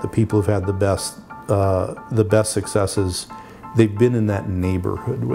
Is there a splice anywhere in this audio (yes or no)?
no